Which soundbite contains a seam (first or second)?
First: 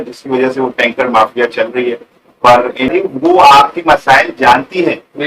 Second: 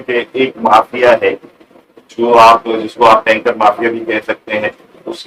first